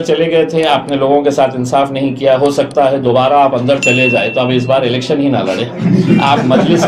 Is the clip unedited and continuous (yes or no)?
yes